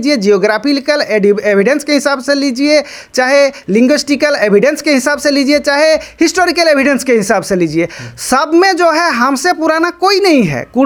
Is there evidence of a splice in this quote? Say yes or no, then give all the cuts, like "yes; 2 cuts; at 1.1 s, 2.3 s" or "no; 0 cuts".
no; 0 cuts